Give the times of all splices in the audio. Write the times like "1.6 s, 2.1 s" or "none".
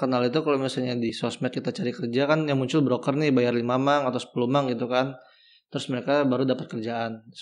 1.1 s

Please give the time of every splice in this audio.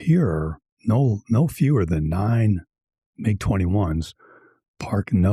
none

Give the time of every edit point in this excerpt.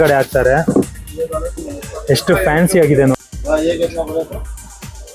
3.1 s

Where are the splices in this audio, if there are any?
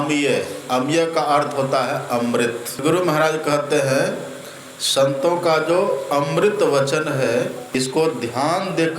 2.8 s, 7.6 s

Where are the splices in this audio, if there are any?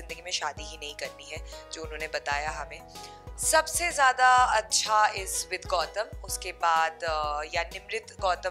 3.1 s

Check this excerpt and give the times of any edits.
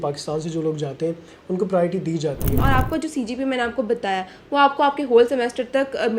2.6 s

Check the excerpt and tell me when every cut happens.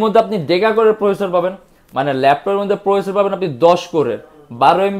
none

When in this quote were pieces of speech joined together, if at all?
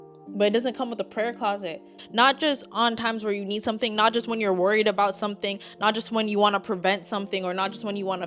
2.0 s

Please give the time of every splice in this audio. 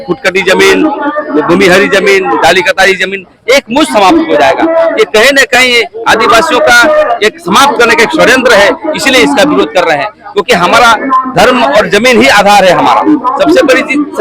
none

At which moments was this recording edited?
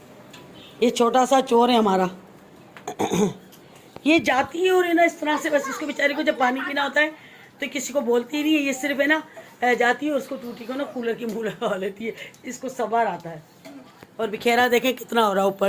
none

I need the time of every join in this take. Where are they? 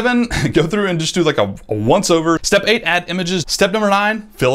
2.4 s, 3.5 s

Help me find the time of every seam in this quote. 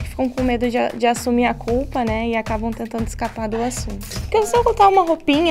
4.2 s

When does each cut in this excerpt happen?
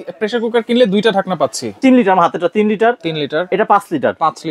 1.8 s

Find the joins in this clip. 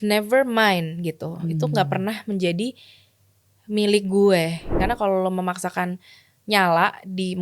4.7 s

